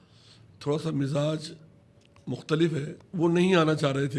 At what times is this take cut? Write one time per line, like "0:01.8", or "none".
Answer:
0:02.9